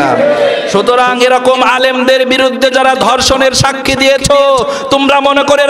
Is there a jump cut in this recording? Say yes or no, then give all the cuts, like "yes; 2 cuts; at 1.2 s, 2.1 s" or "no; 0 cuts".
no; 0 cuts